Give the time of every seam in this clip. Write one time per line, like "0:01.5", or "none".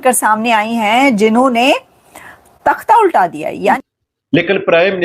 0:03.8